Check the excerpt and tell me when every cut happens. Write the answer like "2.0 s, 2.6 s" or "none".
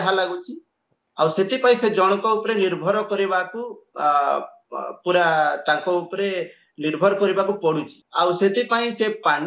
8.0 s